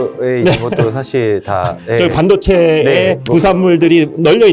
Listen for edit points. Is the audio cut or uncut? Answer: uncut